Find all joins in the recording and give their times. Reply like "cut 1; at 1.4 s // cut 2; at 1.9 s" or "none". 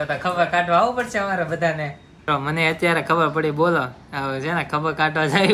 cut 1; at 2.3 s